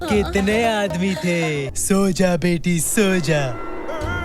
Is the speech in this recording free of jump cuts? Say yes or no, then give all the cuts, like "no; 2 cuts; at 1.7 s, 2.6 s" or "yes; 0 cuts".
no; 1 cut; at 1.7 s